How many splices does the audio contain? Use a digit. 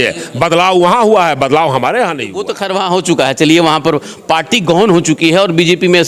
1